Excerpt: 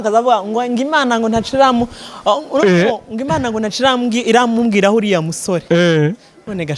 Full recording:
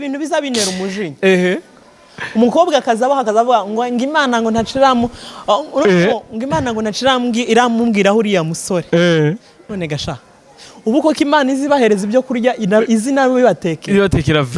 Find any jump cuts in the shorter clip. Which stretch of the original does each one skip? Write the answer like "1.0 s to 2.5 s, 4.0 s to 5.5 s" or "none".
none